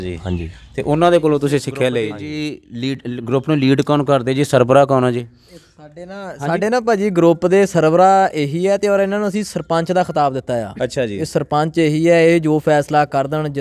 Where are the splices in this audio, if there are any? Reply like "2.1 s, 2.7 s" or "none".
2.2 s